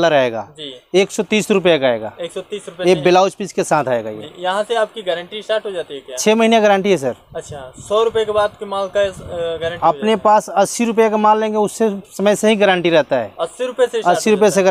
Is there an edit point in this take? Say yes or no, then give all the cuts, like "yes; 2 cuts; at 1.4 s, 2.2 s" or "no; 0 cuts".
no; 0 cuts